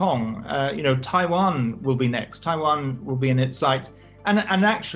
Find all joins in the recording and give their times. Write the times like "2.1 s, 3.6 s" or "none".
none